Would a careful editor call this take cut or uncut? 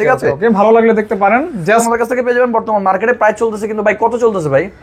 cut